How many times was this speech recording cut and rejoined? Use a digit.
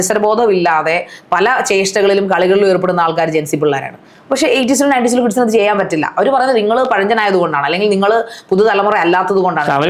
0